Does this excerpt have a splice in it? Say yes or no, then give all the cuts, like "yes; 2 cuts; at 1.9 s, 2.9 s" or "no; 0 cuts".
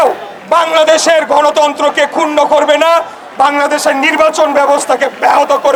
no; 0 cuts